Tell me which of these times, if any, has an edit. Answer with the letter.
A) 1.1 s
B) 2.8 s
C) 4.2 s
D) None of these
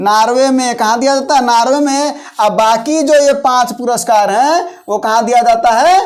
D